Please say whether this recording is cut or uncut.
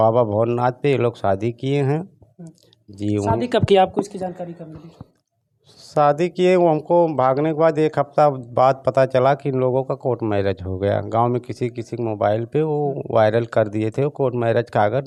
uncut